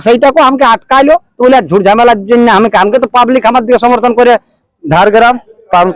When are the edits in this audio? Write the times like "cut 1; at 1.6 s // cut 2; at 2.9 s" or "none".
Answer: cut 1; at 4.6 s